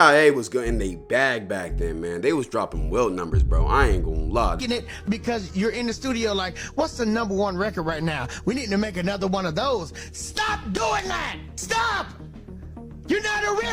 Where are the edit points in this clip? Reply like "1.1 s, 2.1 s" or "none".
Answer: 4.5 s